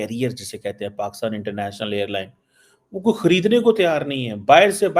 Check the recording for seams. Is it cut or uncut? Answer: uncut